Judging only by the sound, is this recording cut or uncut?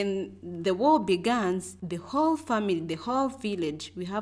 uncut